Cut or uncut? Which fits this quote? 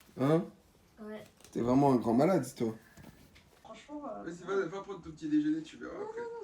cut